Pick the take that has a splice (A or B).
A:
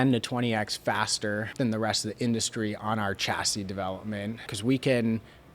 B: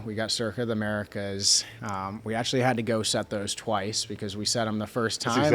A